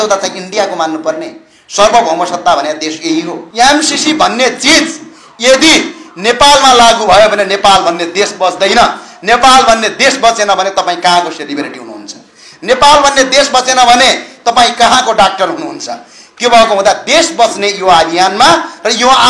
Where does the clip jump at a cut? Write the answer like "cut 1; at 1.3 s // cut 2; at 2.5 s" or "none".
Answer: cut 1; at 3.4 s